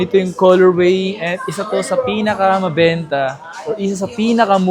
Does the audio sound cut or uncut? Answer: uncut